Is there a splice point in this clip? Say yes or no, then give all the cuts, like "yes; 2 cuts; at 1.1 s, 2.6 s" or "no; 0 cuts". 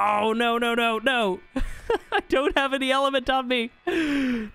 no; 0 cuts